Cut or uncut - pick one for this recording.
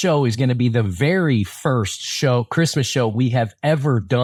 uncut